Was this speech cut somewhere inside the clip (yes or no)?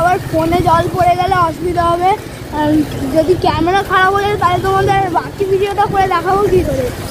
no